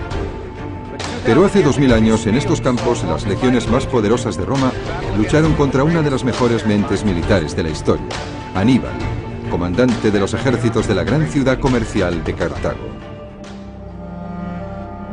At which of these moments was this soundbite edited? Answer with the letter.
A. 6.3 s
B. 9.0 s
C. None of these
B